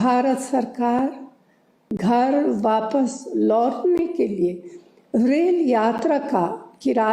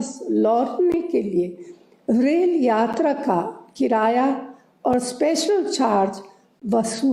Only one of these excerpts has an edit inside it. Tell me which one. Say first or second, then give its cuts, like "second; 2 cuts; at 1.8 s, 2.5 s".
first; 1 cut; at 1.9 s